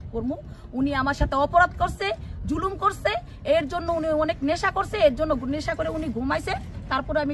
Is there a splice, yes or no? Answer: no